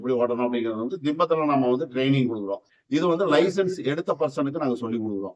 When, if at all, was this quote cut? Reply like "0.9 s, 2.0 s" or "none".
none